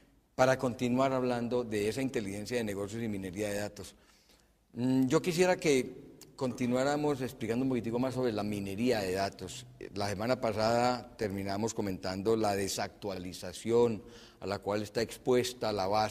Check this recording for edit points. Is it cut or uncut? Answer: uncut